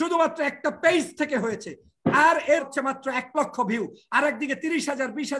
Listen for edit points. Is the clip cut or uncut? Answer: cut